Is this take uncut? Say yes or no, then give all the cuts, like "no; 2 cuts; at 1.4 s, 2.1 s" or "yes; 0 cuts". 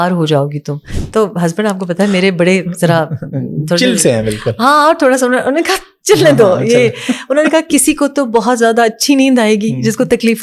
no; 1 cut; at 0.9 s